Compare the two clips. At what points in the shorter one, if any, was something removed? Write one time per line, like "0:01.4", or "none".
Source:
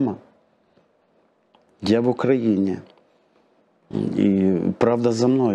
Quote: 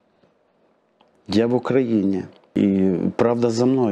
0:02.5